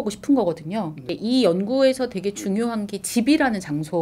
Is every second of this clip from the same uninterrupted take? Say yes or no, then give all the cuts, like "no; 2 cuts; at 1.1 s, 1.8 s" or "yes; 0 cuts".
no; 1 cut; at 1.1 s